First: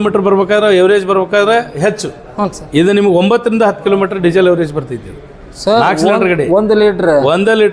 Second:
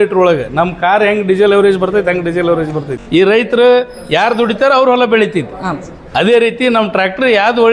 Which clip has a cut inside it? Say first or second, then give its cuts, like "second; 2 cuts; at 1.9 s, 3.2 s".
second; 1 cut; at 3.0 s